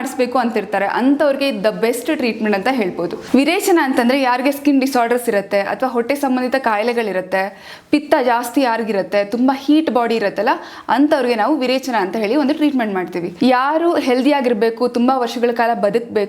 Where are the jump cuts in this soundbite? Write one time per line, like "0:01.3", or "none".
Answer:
0:03.2
0:13.2